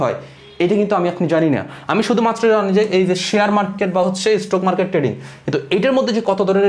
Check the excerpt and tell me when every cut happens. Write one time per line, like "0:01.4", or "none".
none